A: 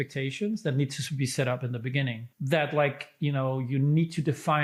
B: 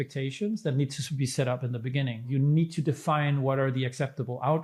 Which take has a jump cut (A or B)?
B